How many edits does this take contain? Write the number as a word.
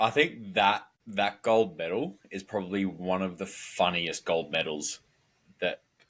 one